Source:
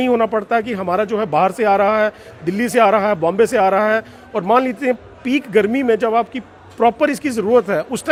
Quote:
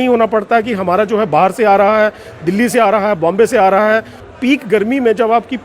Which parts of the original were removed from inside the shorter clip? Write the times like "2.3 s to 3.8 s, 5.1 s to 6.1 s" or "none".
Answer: 4.3 s to 5.1 s